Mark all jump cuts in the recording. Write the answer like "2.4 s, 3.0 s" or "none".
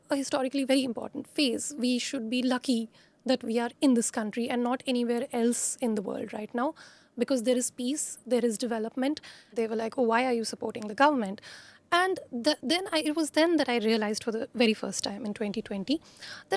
9.5 s

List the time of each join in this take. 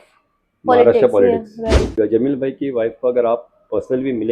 1.9 s

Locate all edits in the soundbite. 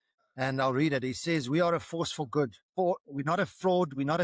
2.7 s

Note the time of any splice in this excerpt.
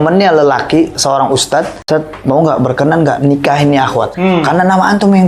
1.8 s, 4.1 s

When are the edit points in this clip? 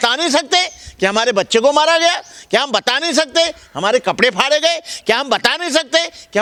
none

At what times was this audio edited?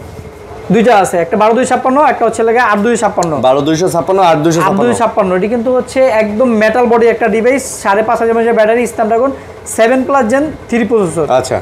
none

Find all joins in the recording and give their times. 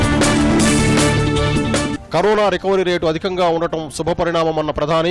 1.9 s

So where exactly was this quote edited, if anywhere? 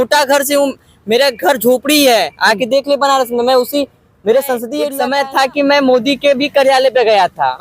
4.9 s

